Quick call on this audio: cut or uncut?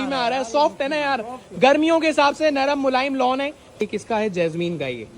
cut